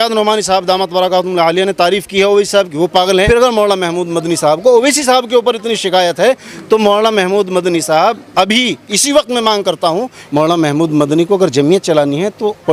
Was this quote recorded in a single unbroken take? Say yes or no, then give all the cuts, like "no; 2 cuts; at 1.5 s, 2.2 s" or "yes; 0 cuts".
no; 2 cuts; at 3.3 s, 10.2 s